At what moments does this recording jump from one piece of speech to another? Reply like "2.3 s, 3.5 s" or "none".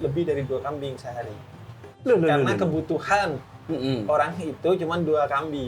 none